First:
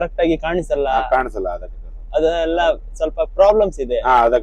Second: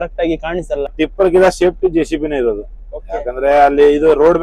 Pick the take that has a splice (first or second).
second